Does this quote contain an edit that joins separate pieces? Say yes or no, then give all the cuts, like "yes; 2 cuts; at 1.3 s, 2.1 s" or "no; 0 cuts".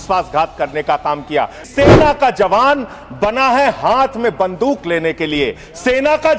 yes; 1 cut; at 1.7 s